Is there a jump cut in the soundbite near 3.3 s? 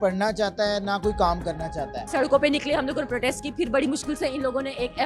no; 1 cut; at 2.0 s

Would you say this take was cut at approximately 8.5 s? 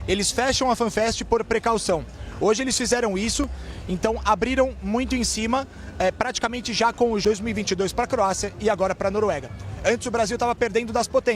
no; 1 cut; at 7.2 s

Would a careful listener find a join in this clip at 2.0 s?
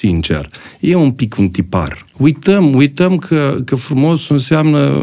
yes; 1 cut; at 2.0 s

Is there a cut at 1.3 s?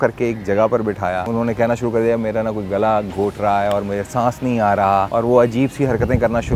yes; 2 cuts; at 1.3 s, 5.1 s

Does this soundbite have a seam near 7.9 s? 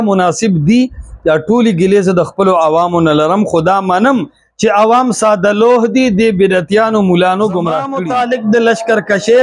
yes; 1 cut; at 7.9 s

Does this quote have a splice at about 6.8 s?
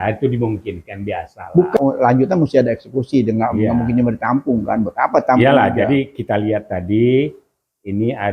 no; 1 cut; at 1.8 s

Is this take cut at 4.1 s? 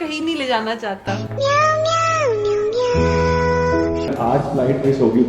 yes; 1 cut; at 4.1 s

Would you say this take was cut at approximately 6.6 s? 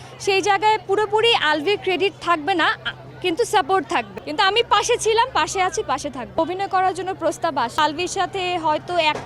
no; 2 cuts; at 4.1 s, 7.8 s

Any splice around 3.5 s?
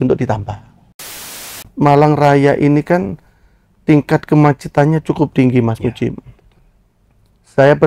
no; 1 cut; at 1.2 s

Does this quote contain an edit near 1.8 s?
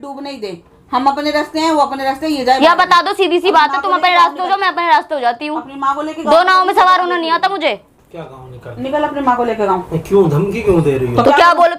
no; 0 cuts

